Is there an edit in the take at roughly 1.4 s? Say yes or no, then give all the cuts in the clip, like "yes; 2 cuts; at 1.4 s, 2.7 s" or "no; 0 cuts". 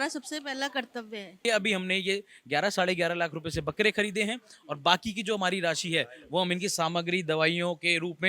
yes; 1 cut; at 1.4 s